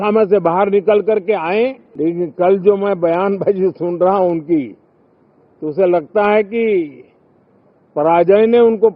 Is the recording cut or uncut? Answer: cut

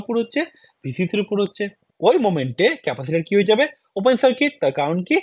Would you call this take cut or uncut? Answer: cut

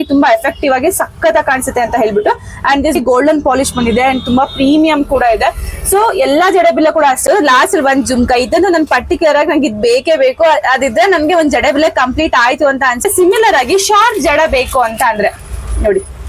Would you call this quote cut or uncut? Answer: cut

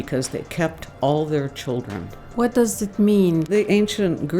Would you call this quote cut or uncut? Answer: cut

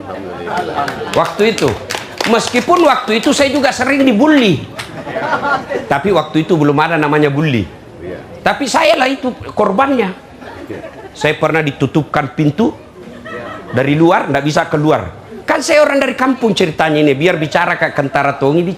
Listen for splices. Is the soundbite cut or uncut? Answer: uncut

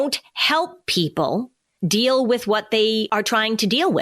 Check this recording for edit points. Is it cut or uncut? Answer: cut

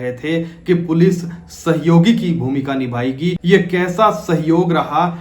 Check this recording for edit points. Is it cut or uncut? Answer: cut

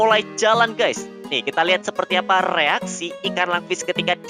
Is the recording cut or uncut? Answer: uncut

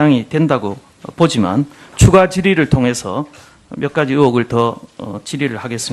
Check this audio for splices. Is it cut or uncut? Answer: uncut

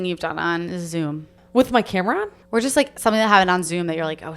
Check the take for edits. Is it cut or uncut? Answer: cut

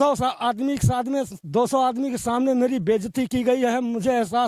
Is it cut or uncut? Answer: uncut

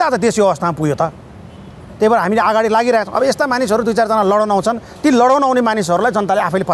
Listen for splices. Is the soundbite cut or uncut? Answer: uncut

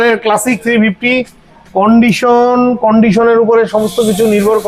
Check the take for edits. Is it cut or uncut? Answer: uncut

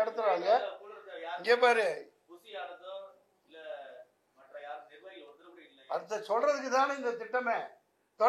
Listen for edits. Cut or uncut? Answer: uncut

